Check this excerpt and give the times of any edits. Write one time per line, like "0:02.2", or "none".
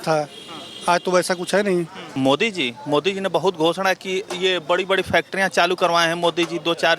0:02.0